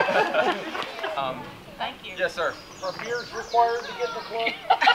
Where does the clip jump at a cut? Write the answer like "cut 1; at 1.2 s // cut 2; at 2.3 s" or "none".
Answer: cut 1; at 1.1 s